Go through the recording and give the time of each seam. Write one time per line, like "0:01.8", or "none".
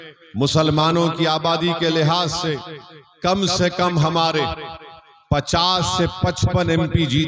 none